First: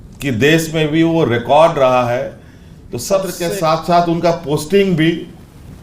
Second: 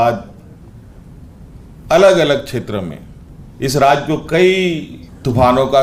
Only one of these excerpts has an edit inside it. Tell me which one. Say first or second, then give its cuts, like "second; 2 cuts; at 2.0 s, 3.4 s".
first; 1 cut; at 3.4 s